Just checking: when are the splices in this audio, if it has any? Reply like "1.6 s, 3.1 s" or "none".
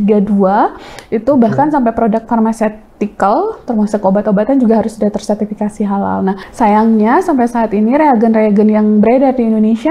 6.4 s